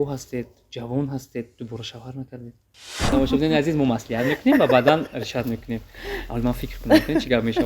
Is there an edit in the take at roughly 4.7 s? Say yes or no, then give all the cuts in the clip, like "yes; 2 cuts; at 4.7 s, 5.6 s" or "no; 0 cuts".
no; 1 cut; at 3.1 s